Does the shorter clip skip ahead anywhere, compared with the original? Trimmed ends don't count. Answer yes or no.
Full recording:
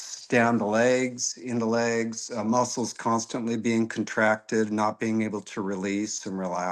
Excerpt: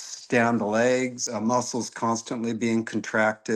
yes